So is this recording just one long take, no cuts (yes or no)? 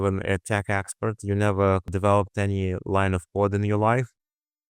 no